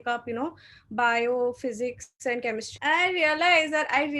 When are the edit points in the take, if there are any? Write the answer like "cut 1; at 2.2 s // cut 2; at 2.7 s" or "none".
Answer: cut 1; at 2.7 s